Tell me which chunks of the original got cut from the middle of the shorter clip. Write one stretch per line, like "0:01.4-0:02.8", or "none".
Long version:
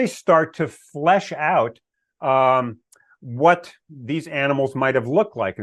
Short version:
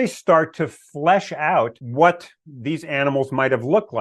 0:01.8-0:03.2